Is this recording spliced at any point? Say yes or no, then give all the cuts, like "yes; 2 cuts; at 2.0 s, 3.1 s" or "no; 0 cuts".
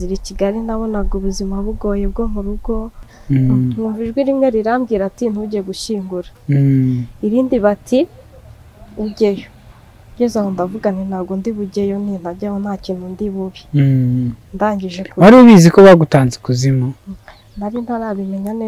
yes; 1 cut; at 3.1 s